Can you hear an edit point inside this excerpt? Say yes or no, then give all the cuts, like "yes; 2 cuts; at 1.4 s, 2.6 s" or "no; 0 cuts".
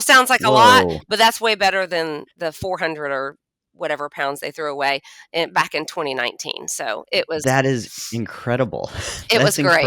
no; 0 cuts